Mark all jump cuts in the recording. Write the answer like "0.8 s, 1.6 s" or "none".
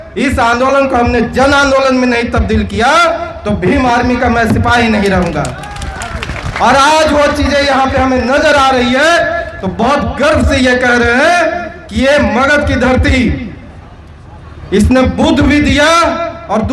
none